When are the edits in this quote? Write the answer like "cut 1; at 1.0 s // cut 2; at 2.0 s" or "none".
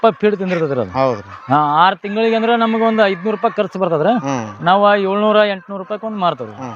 none